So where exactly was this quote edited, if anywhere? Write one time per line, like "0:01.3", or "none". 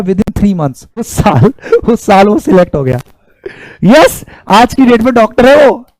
0:01.1